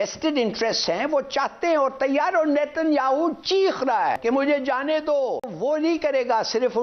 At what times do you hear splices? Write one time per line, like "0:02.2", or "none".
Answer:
0:04.2
0:05.5